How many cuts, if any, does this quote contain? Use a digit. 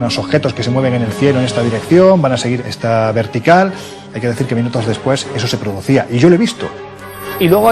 1